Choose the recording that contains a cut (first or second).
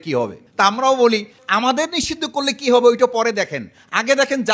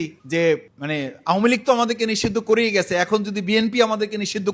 first